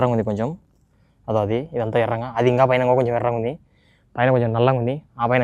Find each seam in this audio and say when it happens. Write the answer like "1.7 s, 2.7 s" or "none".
none